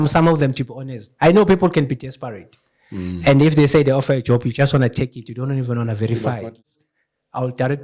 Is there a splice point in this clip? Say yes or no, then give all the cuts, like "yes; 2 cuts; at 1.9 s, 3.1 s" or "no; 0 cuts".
yes; 1 cut; at 6.7 s